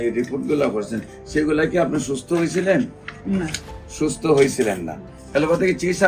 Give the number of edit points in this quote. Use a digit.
1